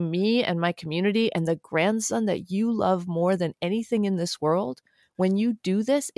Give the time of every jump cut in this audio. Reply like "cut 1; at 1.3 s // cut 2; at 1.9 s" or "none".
none